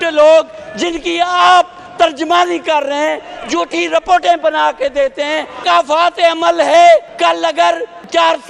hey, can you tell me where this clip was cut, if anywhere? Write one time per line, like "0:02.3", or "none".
0:05.6
0:07.5